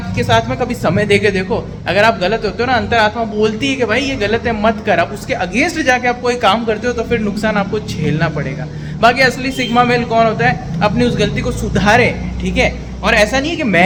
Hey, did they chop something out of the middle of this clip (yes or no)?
no